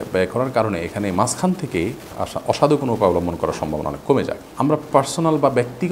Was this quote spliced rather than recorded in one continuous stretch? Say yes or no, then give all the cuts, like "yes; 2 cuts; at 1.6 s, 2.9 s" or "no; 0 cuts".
yes; 1 cut; at 4.4 s